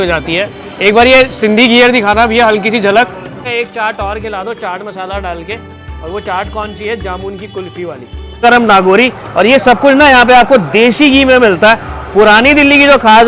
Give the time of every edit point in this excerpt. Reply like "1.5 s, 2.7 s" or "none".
3.4 s, 8.4 s